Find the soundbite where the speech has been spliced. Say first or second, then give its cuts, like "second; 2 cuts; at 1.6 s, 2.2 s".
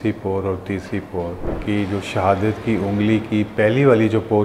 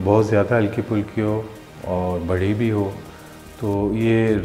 first; 1 cut; at 1.4 s